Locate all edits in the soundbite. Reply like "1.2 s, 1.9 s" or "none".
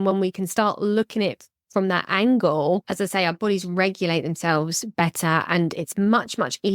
2.9 s